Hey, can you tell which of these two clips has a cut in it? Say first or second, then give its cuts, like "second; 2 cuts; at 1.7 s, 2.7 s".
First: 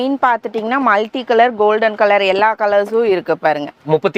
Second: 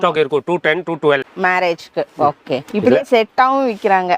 second; 1 cut; at 1.3 s